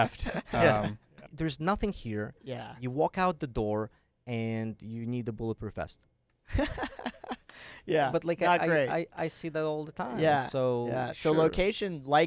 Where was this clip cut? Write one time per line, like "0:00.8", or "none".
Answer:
0:01.2